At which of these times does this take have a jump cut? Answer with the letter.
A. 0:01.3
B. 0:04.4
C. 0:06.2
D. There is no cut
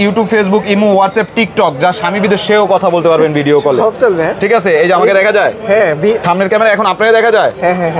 C